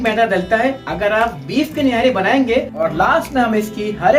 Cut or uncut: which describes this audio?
cut